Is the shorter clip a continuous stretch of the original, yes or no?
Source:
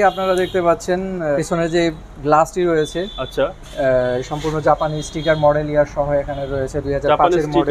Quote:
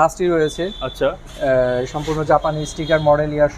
yes